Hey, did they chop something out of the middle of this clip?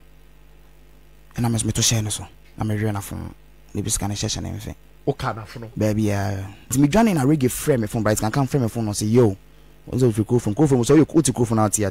yes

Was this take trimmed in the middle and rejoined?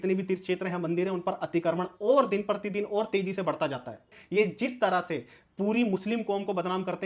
yes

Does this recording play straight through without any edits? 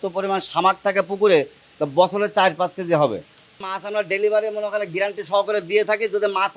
no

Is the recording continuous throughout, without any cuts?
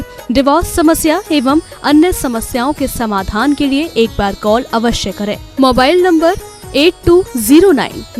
yes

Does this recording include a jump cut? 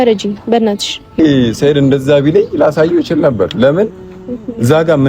yes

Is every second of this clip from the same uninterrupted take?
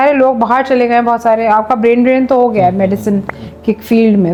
yes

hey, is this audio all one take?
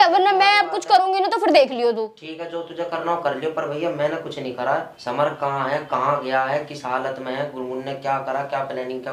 yes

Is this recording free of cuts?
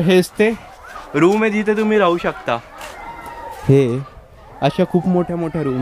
yes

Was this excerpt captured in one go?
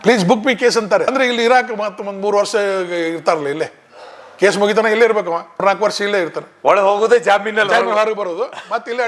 yes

